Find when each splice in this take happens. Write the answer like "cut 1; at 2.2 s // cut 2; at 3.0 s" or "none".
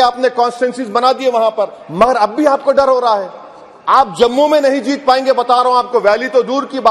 none